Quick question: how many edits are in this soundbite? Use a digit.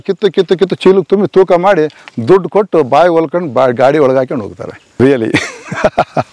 1